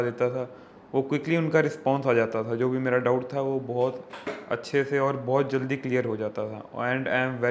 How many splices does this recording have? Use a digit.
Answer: 0